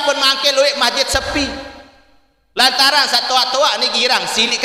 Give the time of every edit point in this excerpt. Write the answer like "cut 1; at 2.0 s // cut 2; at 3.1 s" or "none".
none